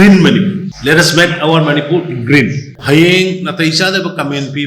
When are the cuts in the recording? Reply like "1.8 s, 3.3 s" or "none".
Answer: 2.7 s